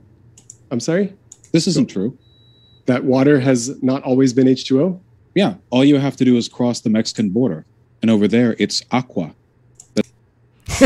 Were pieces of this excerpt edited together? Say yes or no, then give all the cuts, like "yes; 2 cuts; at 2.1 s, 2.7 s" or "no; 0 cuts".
no; 0 cuts